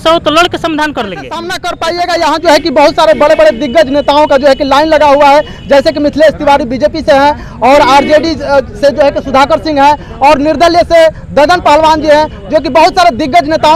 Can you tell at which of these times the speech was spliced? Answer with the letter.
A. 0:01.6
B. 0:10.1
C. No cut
A